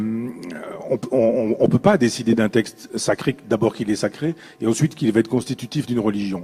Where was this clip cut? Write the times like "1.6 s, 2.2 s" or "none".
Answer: 3.3 s